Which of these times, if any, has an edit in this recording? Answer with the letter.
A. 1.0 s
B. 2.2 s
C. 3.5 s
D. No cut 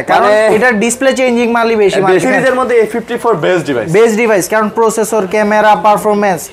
B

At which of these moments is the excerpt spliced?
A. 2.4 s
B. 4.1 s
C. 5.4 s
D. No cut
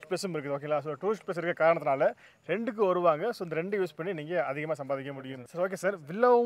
C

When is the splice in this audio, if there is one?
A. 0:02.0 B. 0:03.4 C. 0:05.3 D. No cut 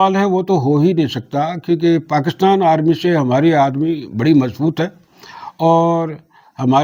D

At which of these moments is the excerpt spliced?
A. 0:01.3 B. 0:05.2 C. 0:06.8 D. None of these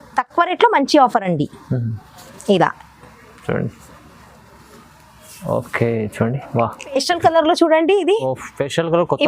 C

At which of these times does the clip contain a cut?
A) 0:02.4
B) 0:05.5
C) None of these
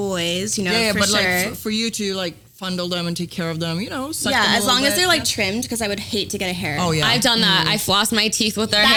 C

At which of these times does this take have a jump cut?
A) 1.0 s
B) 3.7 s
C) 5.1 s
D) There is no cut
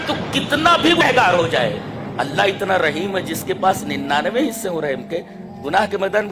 A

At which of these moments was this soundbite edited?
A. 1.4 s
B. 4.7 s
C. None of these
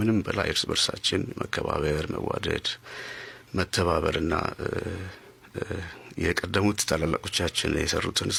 C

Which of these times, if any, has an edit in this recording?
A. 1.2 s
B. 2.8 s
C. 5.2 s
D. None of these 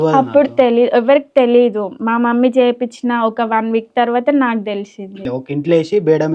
C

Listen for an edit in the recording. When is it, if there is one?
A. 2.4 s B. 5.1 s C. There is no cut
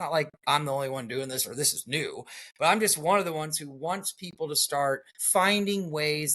B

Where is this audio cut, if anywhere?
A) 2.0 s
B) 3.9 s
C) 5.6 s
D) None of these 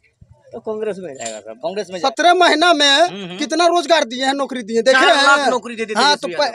A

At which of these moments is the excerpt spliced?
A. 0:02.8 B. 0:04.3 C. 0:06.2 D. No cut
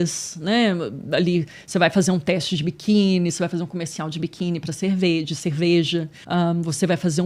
C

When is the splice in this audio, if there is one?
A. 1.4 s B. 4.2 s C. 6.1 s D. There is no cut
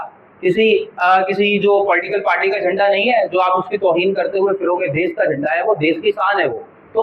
D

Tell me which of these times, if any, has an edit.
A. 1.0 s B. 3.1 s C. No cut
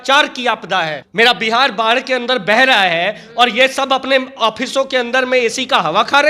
A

